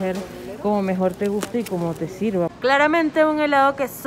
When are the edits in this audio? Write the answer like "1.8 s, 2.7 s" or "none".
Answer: 2.5 s